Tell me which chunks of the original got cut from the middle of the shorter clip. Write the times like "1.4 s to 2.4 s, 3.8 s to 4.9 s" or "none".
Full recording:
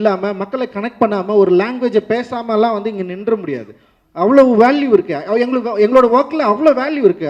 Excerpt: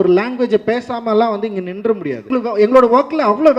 3.8 s to 5.6 s